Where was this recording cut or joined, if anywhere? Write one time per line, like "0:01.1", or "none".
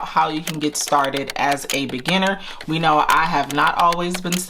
none